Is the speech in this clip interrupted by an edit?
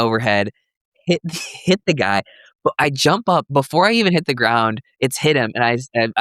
no; 0 cuts

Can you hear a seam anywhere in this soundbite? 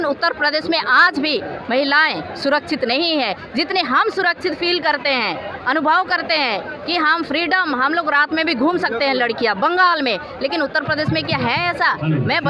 no; 0 cuts

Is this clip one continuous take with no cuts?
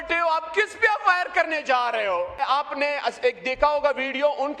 no; 1 cut; at 2.4 s

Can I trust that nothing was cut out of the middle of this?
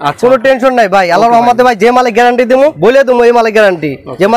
no; 1 cut; at 2.8 s

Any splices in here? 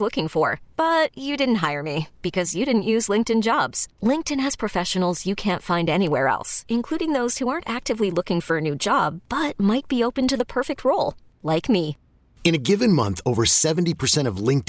no; 0 cuts

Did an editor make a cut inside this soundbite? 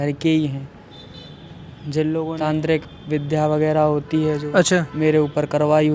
yes; 1 cut; at 1.8 s

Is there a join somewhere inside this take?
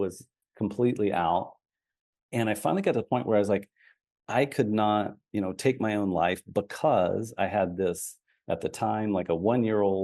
no; 0 cuts

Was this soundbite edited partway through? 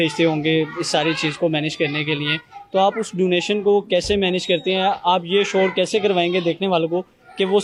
no; 0 cuts

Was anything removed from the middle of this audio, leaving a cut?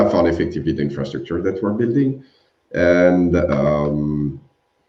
no; 0 cuts

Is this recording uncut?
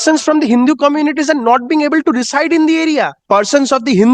no; 1 cut; at 3.2 s

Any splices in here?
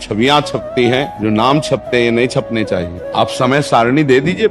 yes; 2 cuts; at 1.1 s, 3.0 s

